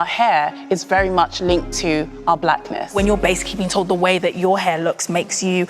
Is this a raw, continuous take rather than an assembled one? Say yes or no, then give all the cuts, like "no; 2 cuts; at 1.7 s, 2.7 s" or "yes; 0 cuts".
no; 1 cut; at 2.9 s